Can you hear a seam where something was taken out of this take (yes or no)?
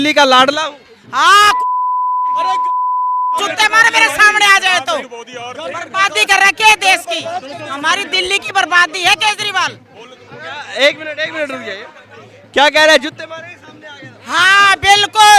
no